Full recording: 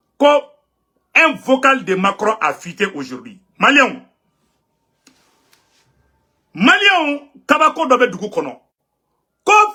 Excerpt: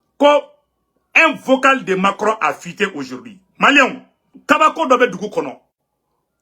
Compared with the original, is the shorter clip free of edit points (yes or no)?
no